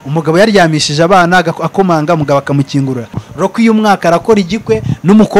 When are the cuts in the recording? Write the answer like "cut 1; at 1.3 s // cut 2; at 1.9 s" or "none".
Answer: cut 1; at 3.2 s